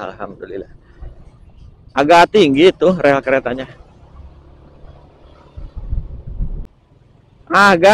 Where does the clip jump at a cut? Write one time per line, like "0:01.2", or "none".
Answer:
0:06.5